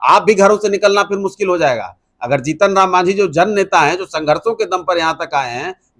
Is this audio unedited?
yes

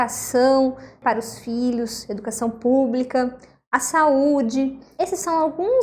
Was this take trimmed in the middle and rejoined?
yes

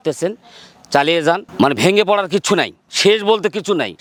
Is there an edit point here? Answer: no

